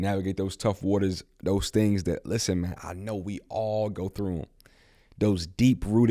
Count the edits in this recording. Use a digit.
0